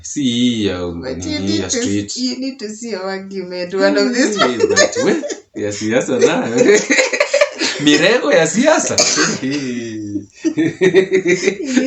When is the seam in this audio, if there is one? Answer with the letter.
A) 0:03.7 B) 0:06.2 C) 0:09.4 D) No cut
D